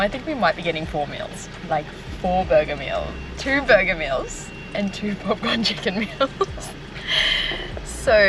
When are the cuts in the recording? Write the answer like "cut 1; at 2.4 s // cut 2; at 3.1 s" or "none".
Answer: none